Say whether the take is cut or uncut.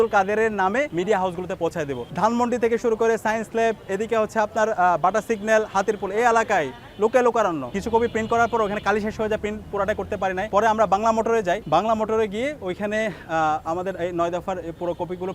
cut